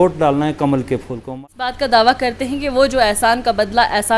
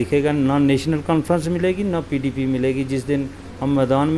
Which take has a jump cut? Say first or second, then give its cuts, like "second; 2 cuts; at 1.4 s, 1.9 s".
first; 1 cut; at 1.7 s